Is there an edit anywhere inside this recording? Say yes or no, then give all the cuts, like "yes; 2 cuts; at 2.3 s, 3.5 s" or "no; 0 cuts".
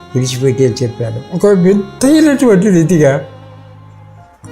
yes; 1 cut; at 1.2 s